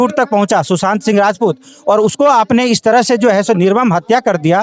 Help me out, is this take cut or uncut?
uncut